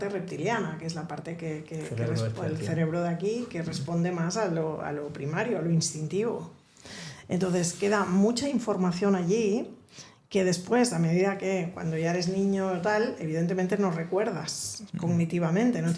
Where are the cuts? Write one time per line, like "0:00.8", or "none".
none

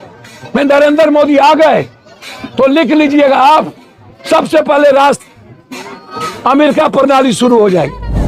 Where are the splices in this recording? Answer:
none

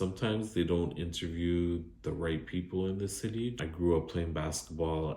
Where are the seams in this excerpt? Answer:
0:03.5

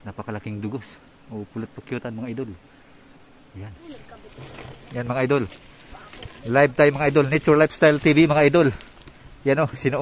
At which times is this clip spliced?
0:03.8

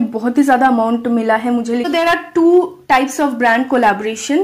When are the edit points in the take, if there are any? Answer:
0:01.9

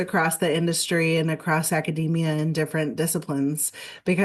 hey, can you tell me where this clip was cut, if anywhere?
none

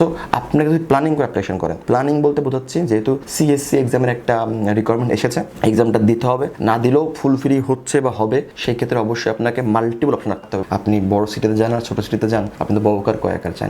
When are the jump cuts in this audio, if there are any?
0:01.8
0:03.3
0:06.5
0:08.5
0:10.5

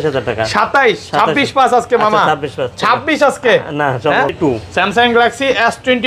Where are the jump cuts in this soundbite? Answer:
0:04.3

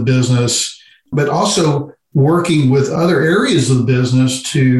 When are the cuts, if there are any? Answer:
0:02.9

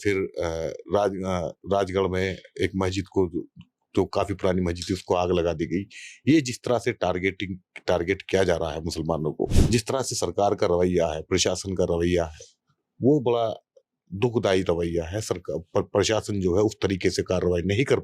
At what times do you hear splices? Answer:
0:09.6

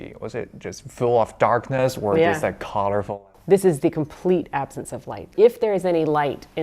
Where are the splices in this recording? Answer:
0:03.1
0:05.3

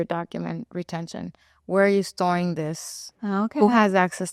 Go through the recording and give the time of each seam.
none

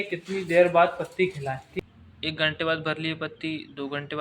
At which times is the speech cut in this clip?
0:01.7

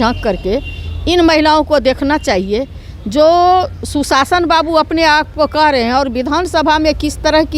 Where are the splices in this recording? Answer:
none

